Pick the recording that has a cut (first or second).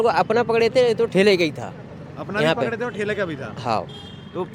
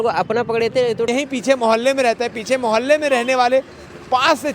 second